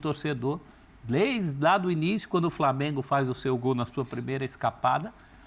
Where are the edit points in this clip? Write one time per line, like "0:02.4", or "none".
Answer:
none